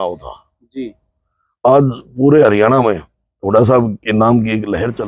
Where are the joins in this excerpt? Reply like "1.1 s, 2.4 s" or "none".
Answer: none